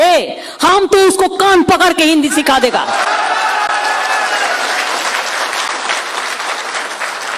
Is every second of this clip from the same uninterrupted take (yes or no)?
yes